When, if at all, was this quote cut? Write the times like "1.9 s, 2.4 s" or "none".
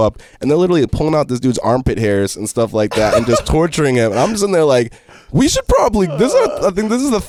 none